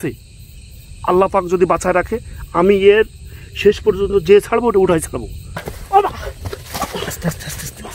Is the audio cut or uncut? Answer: cut